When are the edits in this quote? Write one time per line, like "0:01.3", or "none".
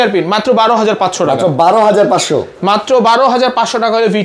none